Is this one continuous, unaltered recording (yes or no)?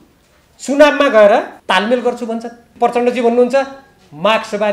no